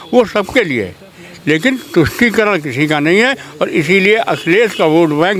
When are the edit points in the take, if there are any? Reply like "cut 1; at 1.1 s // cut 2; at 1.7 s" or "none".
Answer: none